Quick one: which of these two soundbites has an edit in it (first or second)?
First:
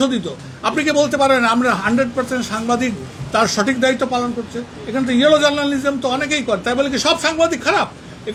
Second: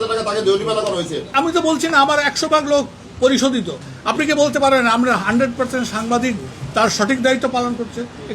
second